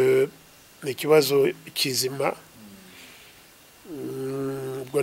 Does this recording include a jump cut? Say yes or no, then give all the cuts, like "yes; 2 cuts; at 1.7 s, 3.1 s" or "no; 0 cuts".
no; 0 cuts